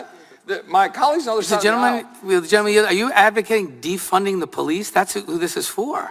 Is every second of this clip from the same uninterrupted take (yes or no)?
yes